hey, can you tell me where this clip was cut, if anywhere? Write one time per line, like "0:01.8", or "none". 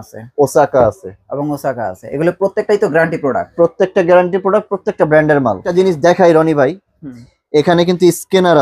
0:05.6